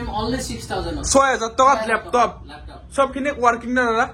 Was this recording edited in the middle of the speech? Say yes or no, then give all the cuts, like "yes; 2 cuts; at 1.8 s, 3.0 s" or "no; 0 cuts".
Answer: no; 0 cuts